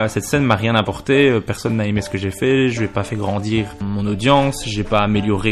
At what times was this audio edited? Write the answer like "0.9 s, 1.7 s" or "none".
3.8 s